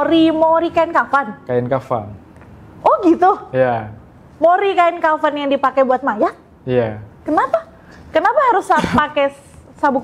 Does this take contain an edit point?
no; 0 cuts

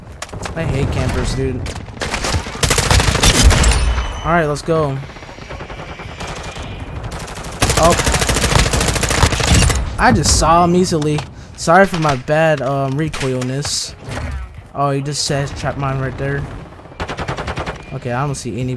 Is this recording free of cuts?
yes; 0 cuts

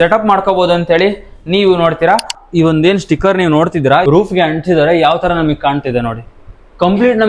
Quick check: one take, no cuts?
no; 2 cuts; at 2.4 s, 4.0 s

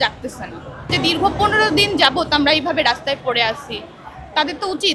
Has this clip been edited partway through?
yes; 1 cut; at 0.9 s

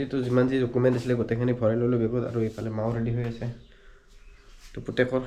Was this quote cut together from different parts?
no; 0 cuts

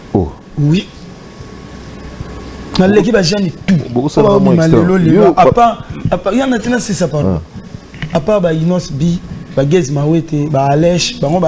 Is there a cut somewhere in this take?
no; 0 cuts

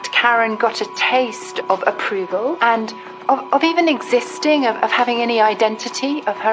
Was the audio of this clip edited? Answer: yes; 2 cuts; at 1.5 s, 2.6 s

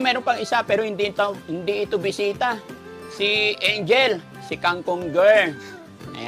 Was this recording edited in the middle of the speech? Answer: no; 0 cuts

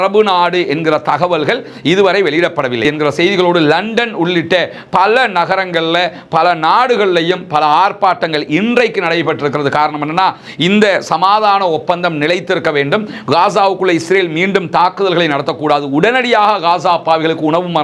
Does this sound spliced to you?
yes; 1 cut; at 2.8 s

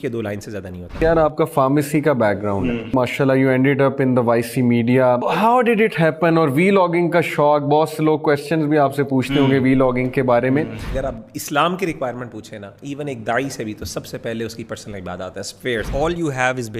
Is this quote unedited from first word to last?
no; 5 cuts; at 1.0 s, 2.9 s, 5.3 s, 10.8 s, 15.9 s

